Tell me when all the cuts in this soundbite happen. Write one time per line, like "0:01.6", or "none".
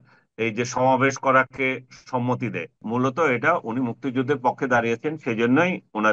0:02.8